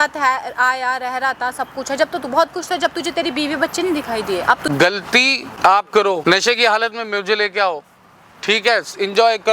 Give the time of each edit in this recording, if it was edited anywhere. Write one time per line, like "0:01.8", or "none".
0:04.6
0:05.5
0:06.2